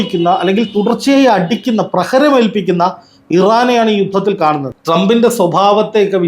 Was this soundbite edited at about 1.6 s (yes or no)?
no